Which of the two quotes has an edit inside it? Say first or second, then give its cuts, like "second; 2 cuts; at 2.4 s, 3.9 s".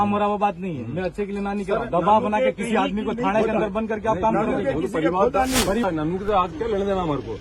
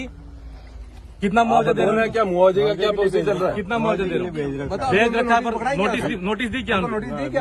first; 1 cut; at 5.8 s